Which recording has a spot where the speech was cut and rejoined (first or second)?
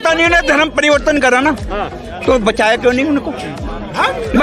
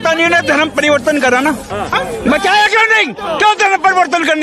second